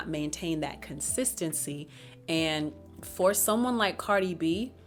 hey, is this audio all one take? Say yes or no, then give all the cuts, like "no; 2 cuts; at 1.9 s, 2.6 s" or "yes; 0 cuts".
yes; 0 cuts